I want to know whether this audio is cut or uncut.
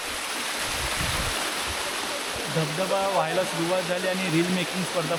uncut